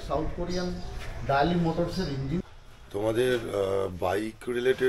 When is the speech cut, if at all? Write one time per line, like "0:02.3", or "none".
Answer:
0:02.5

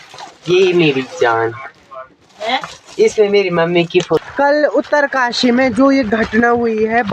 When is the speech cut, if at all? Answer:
0:04.2

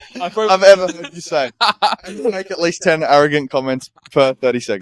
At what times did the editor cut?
none

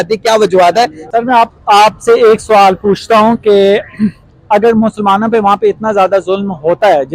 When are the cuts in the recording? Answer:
0:01.0

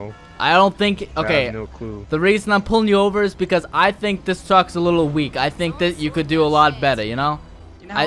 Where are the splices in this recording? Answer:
none

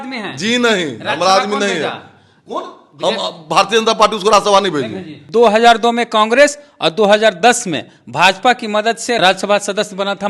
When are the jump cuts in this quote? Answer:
0:05.2
0:09.2

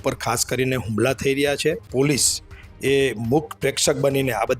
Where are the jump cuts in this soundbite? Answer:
0:01.8

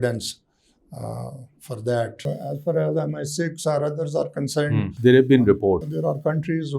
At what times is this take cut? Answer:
0:02.3
0:04.9
0:05.9

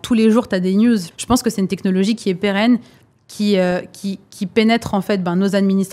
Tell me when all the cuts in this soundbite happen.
0:01.1

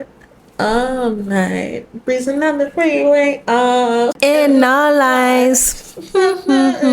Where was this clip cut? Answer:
0:04.2

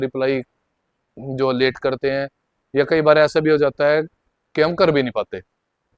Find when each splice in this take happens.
none

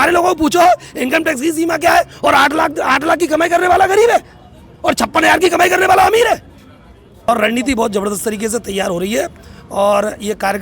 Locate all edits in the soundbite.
0:07.3

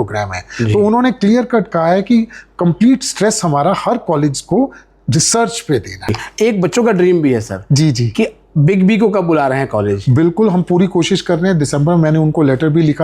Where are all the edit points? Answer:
0:06.2

